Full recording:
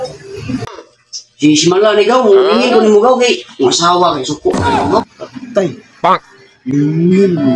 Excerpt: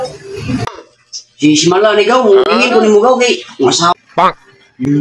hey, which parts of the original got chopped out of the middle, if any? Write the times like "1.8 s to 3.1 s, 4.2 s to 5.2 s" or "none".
3.9 s to 5.8 s